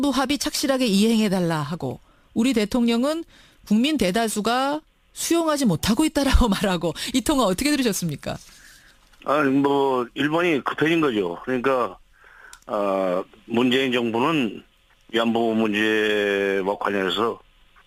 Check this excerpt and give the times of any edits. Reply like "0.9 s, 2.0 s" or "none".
none